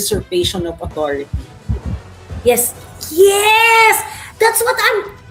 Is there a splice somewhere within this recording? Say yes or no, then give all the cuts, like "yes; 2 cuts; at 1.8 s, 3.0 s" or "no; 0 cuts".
no; 0 cuts